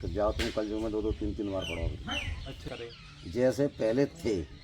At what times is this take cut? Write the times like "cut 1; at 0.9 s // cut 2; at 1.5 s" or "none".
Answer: cut 1; at 2.7 s